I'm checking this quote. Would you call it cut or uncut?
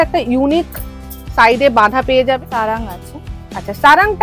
cut